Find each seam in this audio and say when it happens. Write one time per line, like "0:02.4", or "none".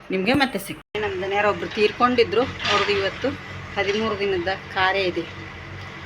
0:01.0